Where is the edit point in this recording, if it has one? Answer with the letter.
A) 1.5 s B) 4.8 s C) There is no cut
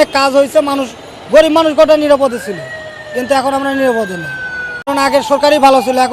B